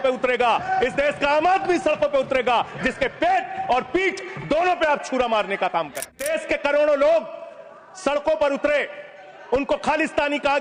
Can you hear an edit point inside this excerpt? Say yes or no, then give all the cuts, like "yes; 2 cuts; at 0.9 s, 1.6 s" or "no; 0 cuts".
yes; 1 cut; at 6.2 s